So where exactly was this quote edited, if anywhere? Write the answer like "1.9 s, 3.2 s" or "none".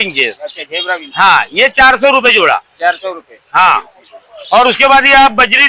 none